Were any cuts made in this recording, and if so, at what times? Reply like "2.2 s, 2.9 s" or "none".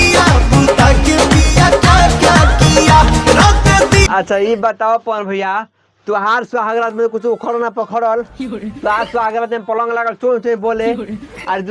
none